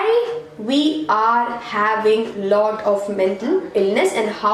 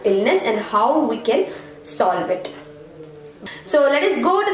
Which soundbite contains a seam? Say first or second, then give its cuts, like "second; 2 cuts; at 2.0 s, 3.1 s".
second; 1 cut; at 3.4 s